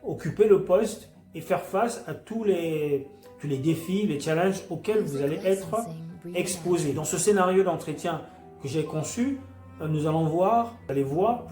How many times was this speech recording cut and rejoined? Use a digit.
1